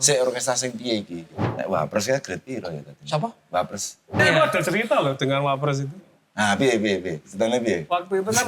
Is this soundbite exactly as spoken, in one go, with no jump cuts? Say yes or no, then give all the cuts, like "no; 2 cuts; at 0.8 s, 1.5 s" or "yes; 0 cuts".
no; 2 cuts; at 1.4 s, 4.2 s